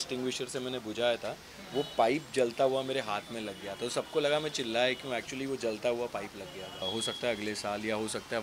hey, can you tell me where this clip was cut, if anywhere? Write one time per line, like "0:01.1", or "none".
0:06.8